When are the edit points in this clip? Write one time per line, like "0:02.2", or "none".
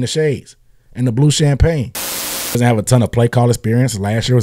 0:02.6